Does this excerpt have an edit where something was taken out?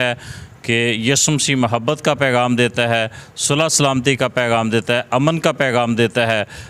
no; 0 cuts

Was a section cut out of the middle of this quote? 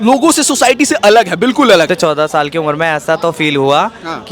yes; 1 cut; at 1.9 s

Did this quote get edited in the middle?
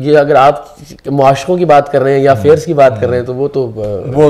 no; 0 cuts

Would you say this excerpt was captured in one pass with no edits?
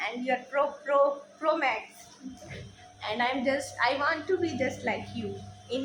yes; 0 cuts

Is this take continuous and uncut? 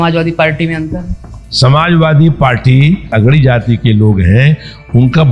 no; 2 cuts; at 1.4 s, 3.1 s

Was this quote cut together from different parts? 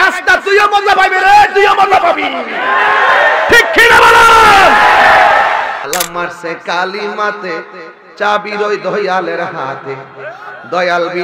yes; 1 cut; at 5.9 s

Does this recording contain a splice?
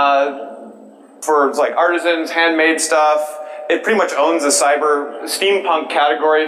no; 0 cuts

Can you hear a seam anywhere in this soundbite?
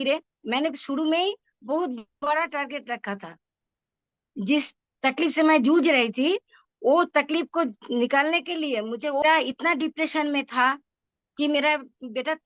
yes; 1 cut; at 9.2 s

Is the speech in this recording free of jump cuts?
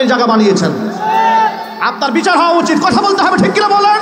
yes; 0 cuts

